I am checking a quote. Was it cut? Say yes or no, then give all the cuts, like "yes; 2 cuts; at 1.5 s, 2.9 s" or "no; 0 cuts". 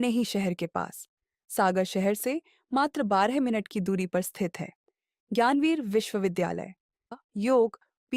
yes; 1 cut; at 7.1 s